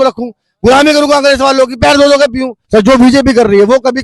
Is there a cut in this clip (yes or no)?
yes